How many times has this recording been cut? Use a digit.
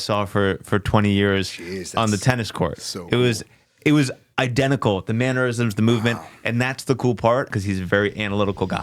1